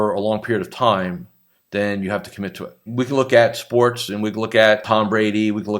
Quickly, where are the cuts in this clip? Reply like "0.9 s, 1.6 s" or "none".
2.9 s, 4.8 s